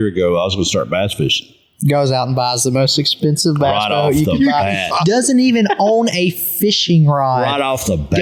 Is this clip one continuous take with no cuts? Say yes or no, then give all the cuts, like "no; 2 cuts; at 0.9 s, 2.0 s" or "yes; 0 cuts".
yes; 0 cuts